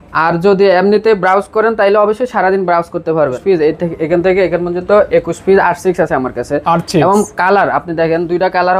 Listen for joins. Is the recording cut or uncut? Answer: cut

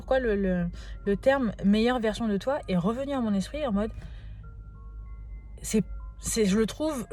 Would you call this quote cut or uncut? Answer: uncut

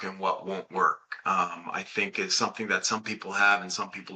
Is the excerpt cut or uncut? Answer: uncut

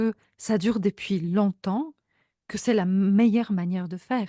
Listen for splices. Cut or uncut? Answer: uncut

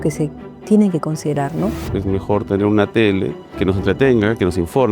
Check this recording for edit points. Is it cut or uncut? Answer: cut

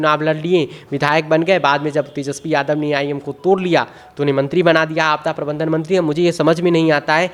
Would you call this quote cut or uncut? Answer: uncut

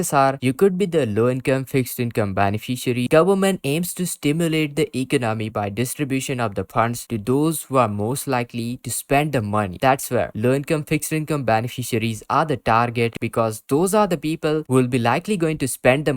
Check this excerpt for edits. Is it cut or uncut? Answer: cut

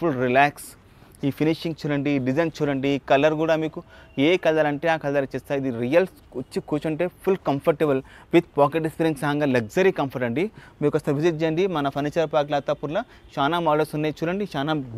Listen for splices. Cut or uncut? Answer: uncut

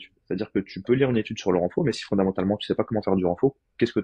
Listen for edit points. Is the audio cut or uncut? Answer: uncut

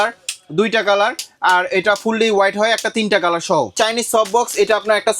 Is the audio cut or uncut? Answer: cut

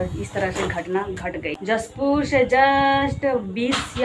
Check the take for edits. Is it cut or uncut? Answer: cut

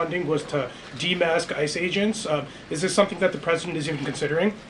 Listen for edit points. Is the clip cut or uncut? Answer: uncut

